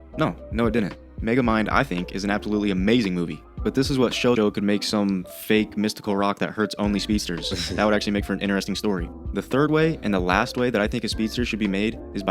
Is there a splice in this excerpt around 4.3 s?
yes; 1 cut; at 4.3 s

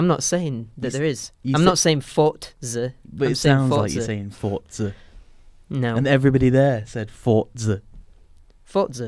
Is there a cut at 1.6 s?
no; 1 cut; at 6.0 s

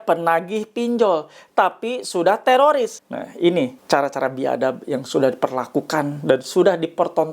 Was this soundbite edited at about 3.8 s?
yes; 2 cuts; at 3.1 s, 3.8 s

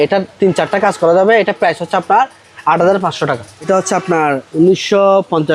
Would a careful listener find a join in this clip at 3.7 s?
yes; 1 cut; at 3.7 s

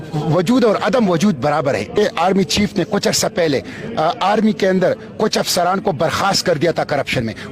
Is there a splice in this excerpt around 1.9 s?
yes; 1 cut; at 1.9 s

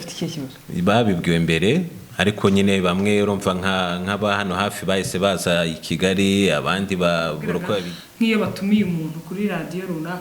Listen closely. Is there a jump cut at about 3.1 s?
no; 1 cut; at 7.9 s

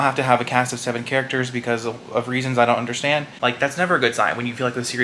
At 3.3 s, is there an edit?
yes; 1 cut; at 3.3 s

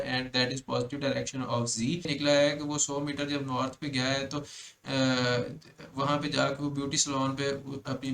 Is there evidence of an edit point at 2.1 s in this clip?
yes; 1 cut; at 2.1 s

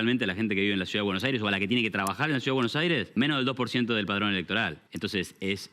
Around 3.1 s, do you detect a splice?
yes; 2 cuts; at 3.1 s, 4.8 s

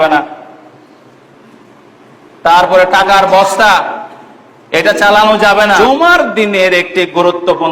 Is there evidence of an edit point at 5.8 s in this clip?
yes; 1 cut; at 5.8 s

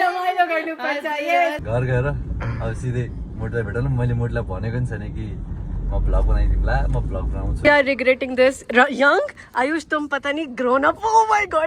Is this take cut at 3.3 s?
no; 2 cuts; at 1.6 s, 7.5 s

